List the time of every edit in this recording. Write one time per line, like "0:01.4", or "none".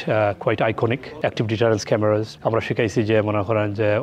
0:01.1
0:02.3